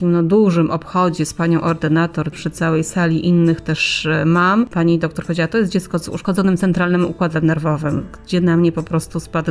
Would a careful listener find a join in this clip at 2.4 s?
yes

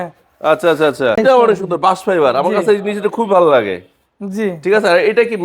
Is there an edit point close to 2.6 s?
no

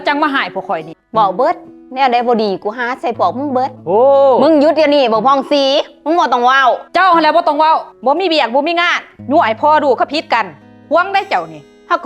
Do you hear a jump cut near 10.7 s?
no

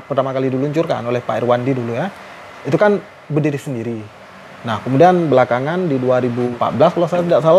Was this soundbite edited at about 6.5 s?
yes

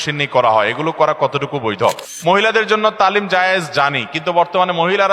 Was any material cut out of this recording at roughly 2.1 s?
yes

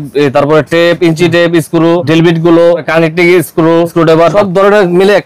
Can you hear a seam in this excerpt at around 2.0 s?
yes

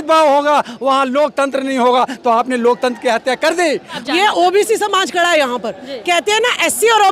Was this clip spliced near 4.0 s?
yes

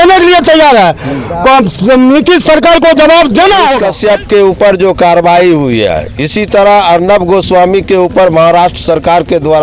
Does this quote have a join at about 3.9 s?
yes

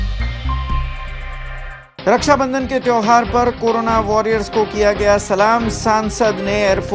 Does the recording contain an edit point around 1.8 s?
yes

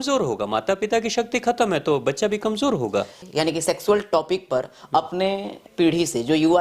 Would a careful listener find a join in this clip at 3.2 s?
yes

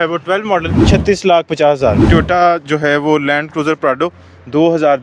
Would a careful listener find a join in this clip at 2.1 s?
yes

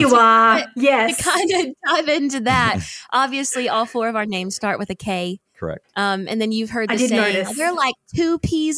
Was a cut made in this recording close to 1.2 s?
yes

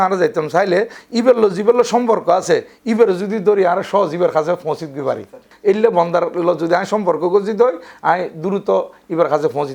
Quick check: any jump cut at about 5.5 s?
yes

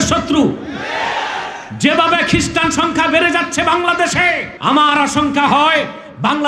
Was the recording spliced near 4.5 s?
yes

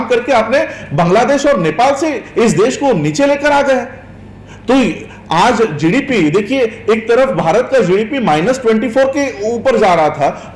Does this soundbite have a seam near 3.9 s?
no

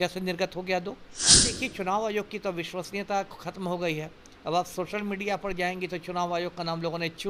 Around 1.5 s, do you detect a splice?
yes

